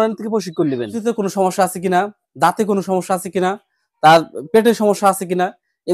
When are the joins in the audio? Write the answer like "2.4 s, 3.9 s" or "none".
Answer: 1.0 s

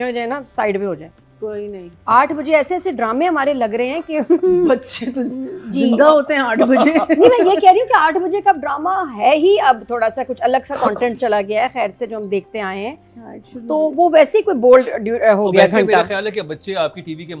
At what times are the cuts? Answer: none

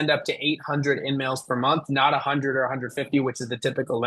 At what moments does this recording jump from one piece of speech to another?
none

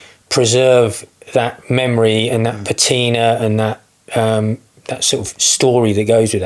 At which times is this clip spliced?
none

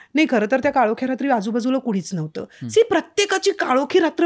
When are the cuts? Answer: none

